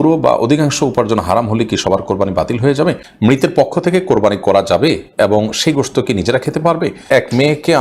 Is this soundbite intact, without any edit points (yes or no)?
no